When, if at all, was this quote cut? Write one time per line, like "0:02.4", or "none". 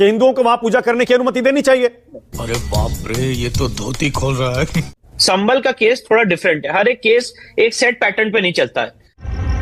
none